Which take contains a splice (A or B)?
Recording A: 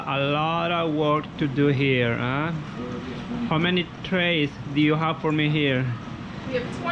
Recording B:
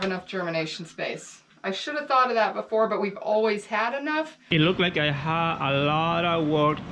B